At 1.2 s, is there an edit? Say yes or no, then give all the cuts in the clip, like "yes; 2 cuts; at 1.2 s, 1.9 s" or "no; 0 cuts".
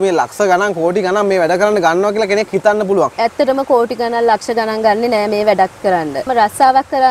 no; 2 cuts; at 3.1 s, 6.3 s